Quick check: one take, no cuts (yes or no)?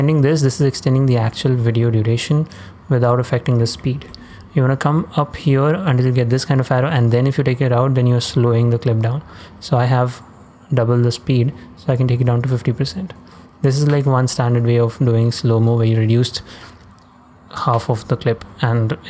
yes